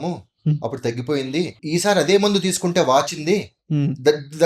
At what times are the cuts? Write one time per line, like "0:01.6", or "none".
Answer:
0:01.6

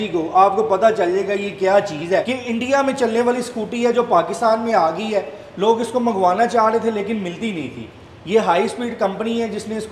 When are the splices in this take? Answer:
0:02.3

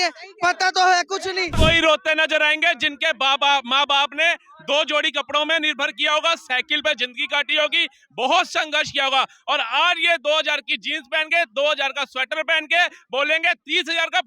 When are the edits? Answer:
0:01.5

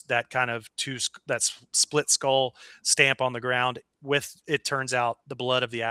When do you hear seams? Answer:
none

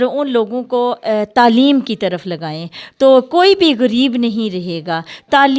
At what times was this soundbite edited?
none

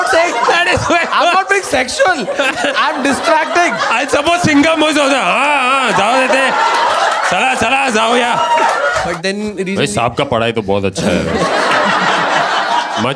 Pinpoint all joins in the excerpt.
0:09.1

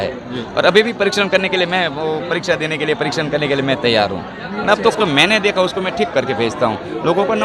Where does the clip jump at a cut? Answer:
0:04.9

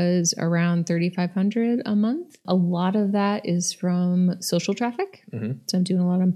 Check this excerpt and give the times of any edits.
0:02.4

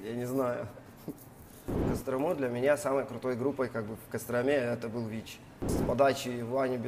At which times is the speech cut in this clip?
0:01.9
0:05.7

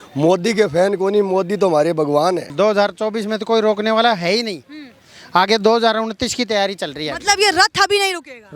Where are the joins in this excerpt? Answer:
0:02.5

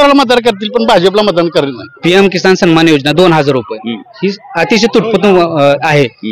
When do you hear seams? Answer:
0:01.9

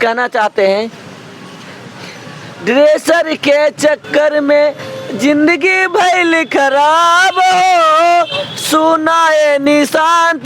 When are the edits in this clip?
none

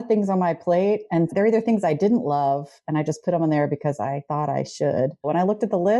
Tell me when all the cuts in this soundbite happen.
0:01.3
0:04.2
0:05.2

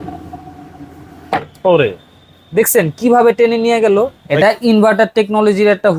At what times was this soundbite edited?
0:04.2

